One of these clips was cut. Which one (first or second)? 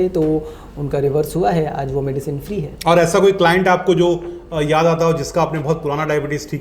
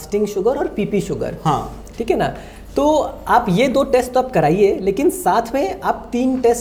first